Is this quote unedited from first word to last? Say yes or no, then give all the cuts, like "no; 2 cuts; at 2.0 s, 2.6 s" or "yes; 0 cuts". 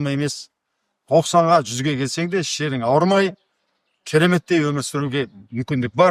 yes; 0 cuts